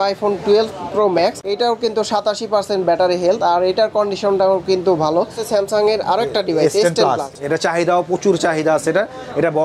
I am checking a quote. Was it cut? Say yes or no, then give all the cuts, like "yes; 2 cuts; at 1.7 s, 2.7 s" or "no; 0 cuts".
yes; 1 cut; at 5.4 s